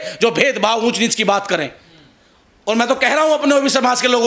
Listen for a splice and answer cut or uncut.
uncut